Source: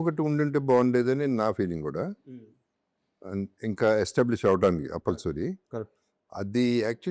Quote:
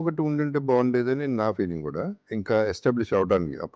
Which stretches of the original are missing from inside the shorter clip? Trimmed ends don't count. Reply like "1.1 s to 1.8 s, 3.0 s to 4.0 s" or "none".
2.2 s to 3.6 s